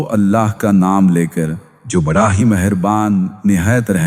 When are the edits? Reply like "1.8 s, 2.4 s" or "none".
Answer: none